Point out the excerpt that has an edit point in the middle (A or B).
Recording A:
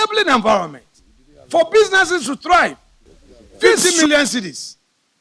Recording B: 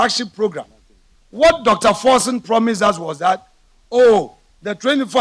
A